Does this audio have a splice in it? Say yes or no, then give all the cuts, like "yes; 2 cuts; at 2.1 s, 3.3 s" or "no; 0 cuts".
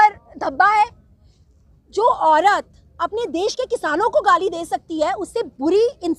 no; 0 cuts